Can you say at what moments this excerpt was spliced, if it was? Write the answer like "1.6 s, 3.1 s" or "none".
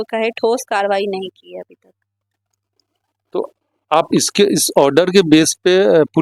none